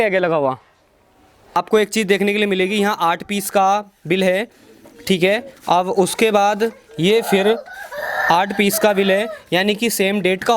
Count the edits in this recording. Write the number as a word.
one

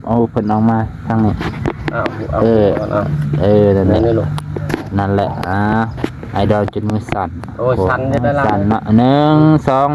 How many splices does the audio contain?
zero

